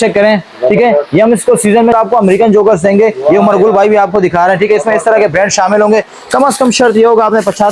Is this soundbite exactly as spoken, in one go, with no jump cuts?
no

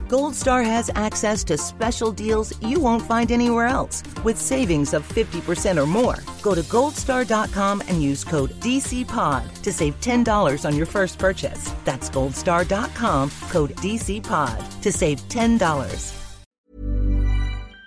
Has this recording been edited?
yes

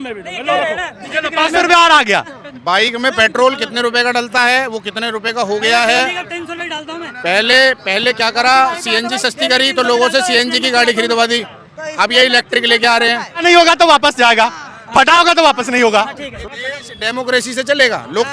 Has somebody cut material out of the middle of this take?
no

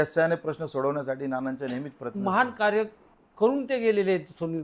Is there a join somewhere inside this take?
yes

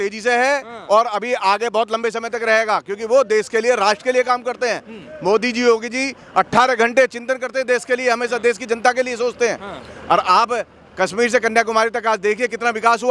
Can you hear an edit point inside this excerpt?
no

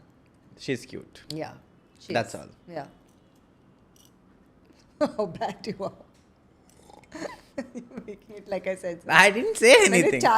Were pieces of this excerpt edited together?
no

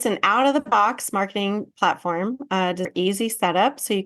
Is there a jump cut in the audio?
yes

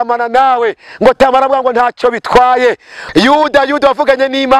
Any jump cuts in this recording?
yes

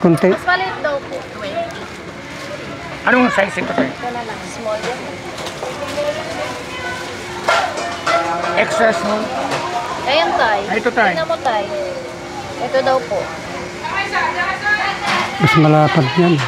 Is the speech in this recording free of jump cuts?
yes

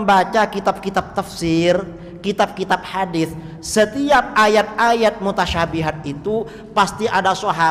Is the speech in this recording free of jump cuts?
yes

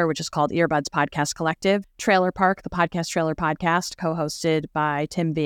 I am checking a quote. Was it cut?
yes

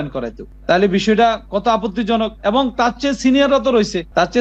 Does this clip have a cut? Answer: no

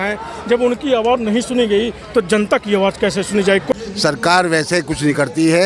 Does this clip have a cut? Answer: yes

